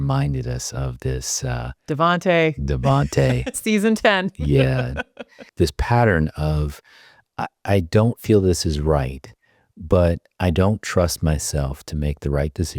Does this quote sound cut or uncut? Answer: cut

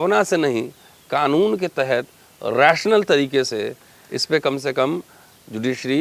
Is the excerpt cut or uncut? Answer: uncut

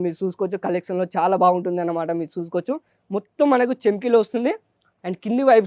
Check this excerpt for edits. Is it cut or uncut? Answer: uncut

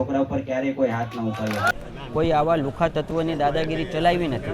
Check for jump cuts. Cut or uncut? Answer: cut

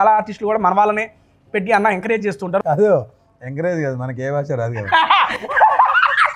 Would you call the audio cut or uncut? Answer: cut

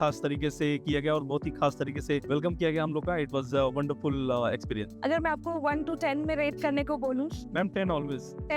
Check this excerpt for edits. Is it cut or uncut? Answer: uncut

